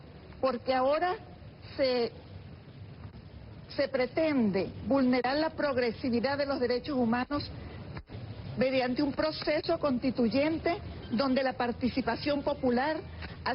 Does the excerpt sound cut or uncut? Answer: cut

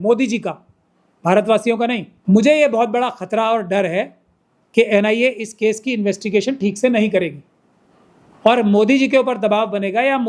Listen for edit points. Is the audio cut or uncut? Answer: cut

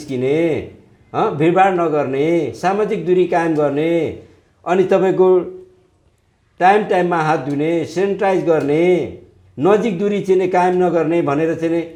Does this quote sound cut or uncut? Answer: uncut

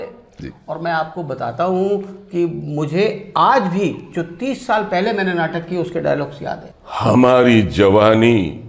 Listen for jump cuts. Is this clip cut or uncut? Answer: cut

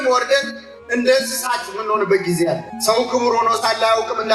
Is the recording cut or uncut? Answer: cut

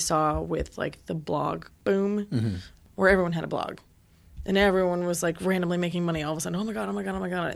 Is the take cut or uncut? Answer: cut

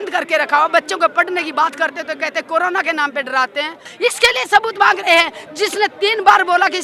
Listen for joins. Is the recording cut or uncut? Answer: cut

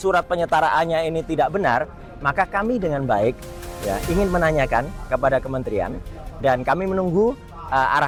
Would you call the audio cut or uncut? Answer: uncut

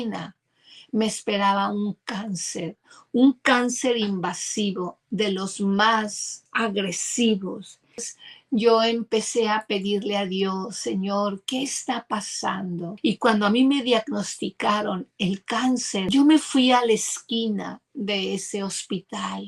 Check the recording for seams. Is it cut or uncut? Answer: cut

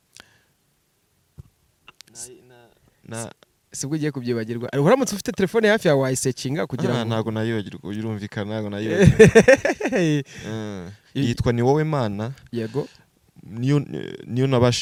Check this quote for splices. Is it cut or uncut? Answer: uncut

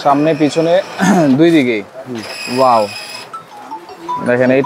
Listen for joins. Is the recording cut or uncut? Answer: uncut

